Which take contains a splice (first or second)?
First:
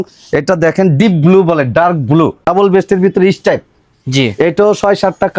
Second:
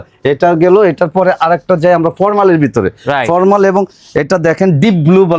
first